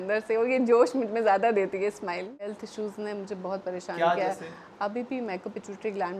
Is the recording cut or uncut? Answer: cut